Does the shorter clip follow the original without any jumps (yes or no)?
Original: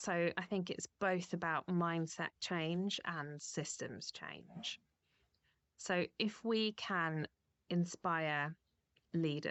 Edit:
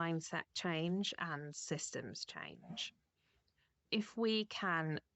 no